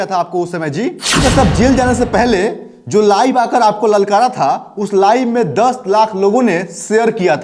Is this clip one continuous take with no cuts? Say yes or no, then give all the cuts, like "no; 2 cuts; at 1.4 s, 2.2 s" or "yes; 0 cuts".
no; 1 cut; at 1.2 s